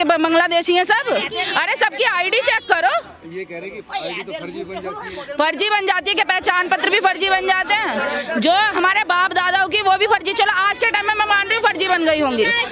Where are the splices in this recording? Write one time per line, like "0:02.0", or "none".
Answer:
none